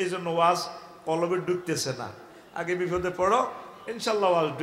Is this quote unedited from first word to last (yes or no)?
yes